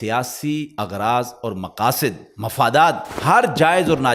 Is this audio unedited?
no; 1 cut; at 3.1 s

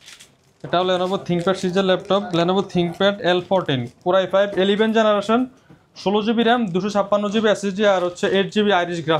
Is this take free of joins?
yes; 0 cuts

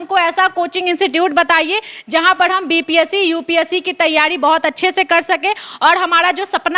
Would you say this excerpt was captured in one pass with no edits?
yes; 0 cuts

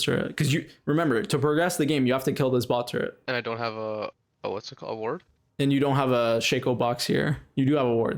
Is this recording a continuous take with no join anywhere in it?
yes; 0 cuts

